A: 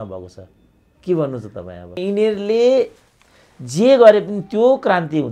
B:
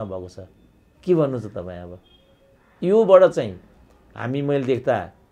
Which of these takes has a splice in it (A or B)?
A